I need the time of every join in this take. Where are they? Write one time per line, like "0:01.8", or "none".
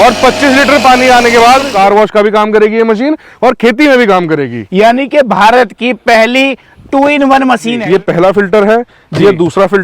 0:01.7
0:07.8